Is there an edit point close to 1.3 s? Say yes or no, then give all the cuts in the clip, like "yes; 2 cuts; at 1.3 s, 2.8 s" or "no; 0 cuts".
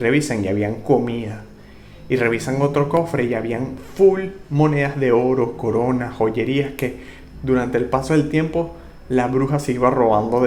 no; 0 cuts